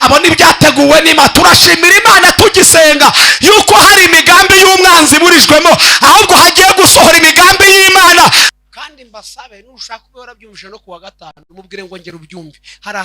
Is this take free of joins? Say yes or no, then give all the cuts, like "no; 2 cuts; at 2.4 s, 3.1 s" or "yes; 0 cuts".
no; 1 cut; at 8.4 s